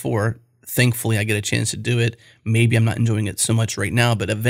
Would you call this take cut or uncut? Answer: uncut